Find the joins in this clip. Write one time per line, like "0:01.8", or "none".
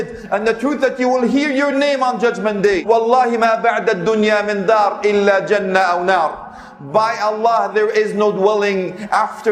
0:02.8